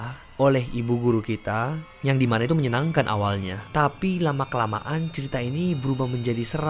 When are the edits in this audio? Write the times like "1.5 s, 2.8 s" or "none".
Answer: 3.6 s